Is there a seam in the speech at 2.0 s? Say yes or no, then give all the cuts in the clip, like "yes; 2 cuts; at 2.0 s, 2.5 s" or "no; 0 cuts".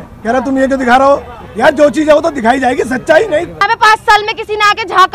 no; 1 cut; at 3.6 s